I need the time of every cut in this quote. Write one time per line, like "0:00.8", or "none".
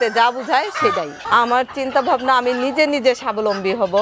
0:01.2